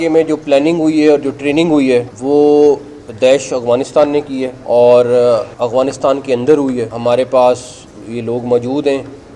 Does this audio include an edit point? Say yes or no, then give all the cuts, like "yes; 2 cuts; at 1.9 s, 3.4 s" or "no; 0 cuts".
yes; 4 cuts; at 2.1 s, 4.5 s, 5.5 s, 6.9 s